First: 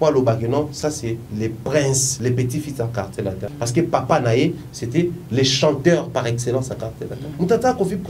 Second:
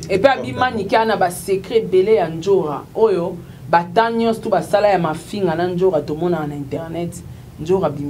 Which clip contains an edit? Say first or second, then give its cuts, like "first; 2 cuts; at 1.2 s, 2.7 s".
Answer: first; 3 cuts; at 2.1 s, 3.5 s, 7.2 s